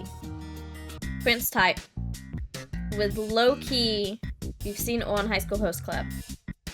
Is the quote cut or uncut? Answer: cut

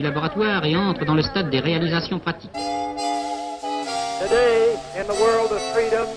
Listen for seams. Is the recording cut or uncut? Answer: uncut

